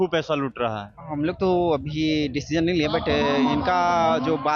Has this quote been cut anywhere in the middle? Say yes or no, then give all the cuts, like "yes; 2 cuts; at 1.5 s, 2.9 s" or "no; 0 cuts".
yes; 1 cut; at 0.9 s